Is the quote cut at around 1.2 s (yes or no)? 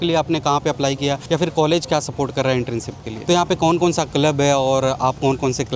yes